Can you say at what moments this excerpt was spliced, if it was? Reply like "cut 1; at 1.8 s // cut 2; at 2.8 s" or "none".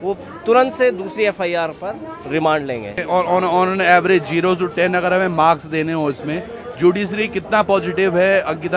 cut 1; at 3.0 s